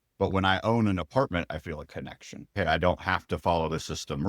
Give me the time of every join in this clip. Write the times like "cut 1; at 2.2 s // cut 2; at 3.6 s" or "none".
cut 1; at 2.5 s